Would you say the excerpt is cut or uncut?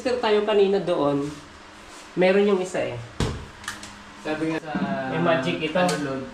cut